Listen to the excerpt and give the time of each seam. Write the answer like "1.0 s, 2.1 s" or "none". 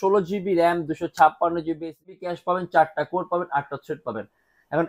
2.1 s